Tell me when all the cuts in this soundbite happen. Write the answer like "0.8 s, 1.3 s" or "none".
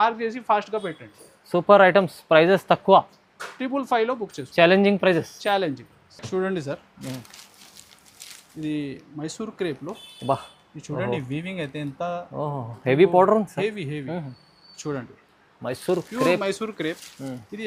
none